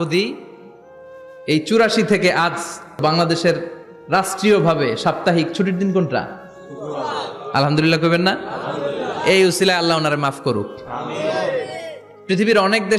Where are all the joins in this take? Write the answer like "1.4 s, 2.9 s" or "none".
3.0 s